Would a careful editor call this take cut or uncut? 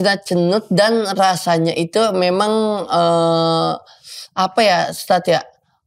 uncut